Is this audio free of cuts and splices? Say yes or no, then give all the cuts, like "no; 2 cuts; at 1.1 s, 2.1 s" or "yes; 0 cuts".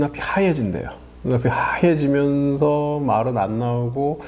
yes; 0 cuts